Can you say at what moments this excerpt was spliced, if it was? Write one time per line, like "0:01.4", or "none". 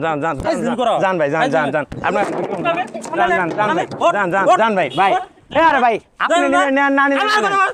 none